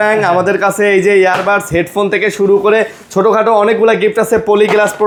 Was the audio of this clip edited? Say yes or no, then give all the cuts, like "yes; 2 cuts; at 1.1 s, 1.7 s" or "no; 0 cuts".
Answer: no; 0 cuts